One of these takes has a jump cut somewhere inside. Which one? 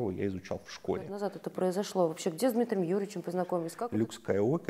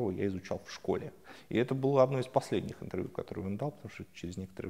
first; 2 cuts; at 1.3 s, 3.7 s

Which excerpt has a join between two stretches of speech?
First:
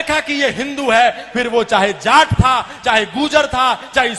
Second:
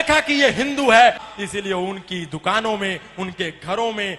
second; 1 cut; at 1.2 s

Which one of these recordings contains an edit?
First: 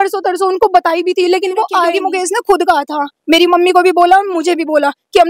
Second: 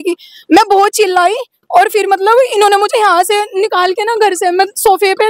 first; 1 cut; at 1.9 s

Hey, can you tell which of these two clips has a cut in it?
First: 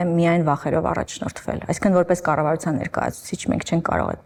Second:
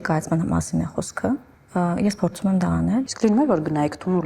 second; 2 cuts; at 1.6 s, 3.1 s

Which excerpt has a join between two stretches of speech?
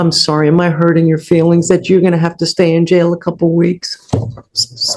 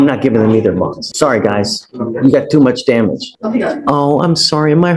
second; 2 cuts; at 1.0 s, 3.3 s

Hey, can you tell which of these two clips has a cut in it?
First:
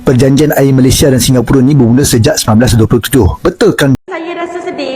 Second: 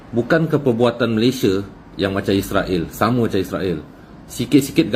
first; 1 cut; at 4.0 s

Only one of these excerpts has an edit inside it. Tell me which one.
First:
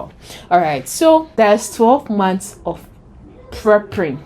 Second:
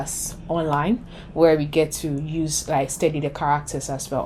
first; 1 cut; at 1.3 s

